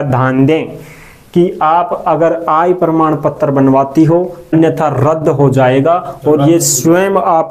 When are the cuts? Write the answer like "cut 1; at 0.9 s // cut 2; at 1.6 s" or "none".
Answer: cut 1; at 4.5 s